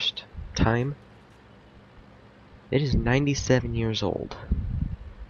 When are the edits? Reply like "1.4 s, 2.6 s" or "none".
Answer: 2.0 s